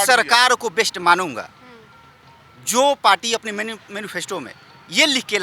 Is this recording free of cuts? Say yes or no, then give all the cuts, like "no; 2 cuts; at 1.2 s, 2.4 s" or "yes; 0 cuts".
yes; 0 cuts